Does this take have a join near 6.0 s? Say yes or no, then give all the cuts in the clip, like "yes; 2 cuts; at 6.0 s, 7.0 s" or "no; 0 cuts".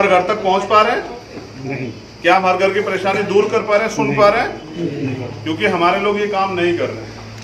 no; 0 cuts